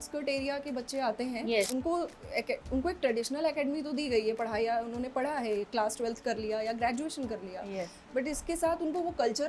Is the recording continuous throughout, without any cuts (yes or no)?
no